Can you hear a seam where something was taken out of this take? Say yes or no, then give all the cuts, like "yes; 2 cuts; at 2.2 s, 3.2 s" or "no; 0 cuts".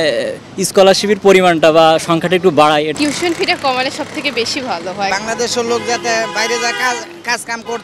yes; 2 cuts; at 2.9 s, 5.1 s